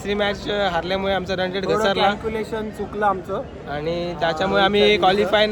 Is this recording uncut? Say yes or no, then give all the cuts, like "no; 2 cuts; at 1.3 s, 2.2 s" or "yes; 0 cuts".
yes; 0 cuts